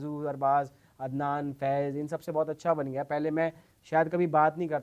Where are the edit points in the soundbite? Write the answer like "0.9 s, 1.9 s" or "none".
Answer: none